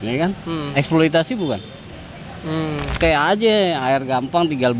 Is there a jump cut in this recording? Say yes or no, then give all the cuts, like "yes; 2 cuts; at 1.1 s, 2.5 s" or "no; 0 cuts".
yes; 1 cut; at 2.9 s